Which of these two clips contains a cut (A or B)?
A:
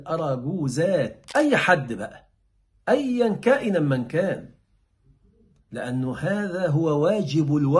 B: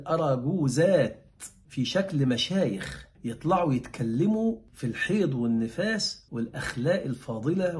A